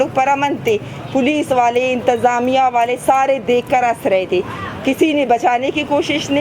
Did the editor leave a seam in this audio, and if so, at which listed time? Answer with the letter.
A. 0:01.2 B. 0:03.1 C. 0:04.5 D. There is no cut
D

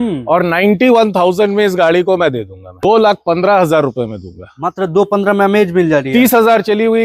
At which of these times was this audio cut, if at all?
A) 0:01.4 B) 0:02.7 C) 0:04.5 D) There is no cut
B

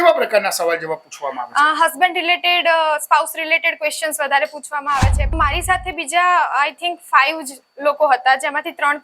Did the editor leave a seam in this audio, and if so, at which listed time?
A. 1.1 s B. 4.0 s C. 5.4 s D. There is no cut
C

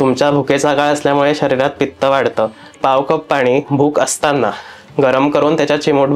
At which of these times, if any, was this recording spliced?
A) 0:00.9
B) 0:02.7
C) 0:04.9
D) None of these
B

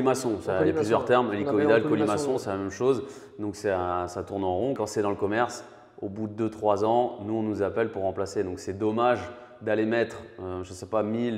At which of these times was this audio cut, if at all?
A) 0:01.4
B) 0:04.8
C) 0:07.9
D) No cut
B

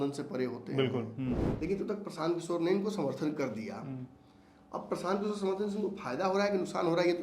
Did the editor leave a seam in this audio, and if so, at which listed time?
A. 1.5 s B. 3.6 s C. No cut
A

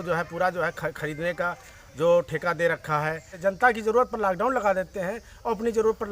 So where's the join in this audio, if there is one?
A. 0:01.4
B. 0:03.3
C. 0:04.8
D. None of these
B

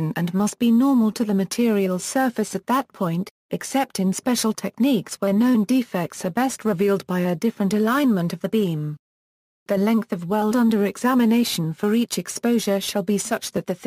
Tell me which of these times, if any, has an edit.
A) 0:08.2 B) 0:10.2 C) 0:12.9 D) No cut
D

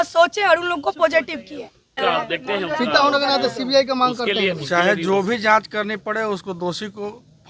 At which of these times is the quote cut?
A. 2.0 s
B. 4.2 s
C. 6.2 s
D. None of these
A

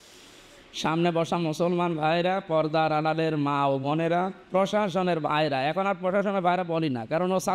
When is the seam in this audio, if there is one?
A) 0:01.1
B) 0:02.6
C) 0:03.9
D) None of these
D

